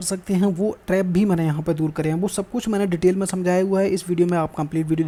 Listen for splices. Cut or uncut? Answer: uncut